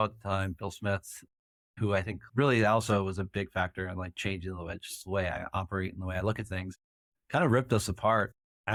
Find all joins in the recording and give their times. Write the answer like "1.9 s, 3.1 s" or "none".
none